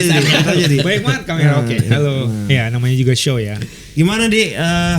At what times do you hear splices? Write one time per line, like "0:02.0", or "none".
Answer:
0:03.6